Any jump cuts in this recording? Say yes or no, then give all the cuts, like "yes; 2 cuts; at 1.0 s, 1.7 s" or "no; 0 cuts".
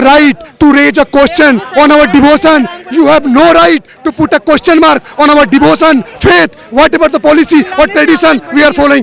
no; 0 cuts